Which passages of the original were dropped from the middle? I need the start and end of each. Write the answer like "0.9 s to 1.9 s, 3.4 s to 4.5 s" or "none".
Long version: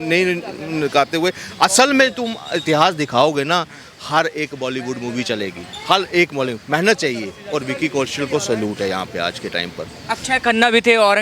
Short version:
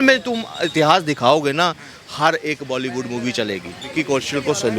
5.8 s to 7.7 s